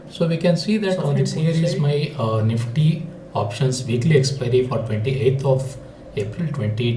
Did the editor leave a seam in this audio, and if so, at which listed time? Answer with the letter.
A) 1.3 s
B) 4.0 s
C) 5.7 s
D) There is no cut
A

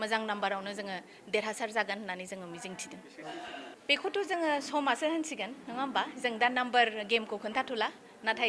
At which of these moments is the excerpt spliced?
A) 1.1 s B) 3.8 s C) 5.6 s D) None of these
B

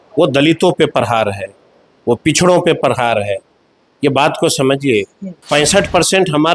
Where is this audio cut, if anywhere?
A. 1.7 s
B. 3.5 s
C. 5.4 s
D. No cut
C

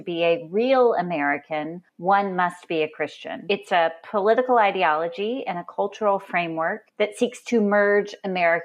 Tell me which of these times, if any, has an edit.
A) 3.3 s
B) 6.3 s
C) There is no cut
A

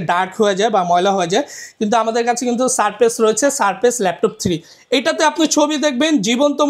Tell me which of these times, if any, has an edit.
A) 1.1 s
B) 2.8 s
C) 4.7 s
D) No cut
C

